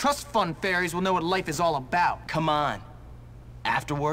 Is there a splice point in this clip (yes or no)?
yes